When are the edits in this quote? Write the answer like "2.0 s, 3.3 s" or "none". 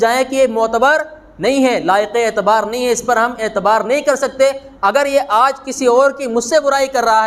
none